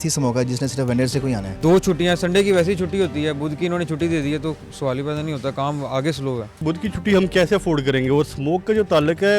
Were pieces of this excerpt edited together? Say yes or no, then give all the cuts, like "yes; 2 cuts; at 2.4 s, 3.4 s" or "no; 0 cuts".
yes; 2 cuts; at 1.5 s, 6.6 s